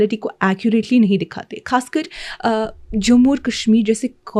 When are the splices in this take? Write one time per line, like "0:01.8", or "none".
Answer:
none